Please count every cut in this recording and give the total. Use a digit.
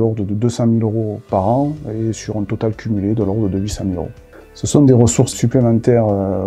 1